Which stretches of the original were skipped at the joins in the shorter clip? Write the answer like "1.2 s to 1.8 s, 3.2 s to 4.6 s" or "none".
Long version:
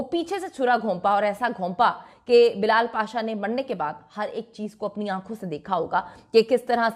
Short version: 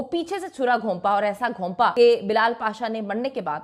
1.9 s to 2.3 s